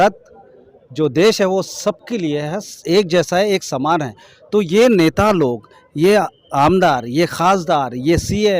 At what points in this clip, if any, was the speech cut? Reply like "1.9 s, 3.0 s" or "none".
none